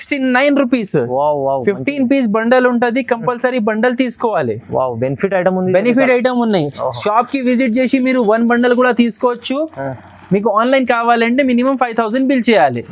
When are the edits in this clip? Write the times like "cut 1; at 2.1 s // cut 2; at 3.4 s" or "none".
none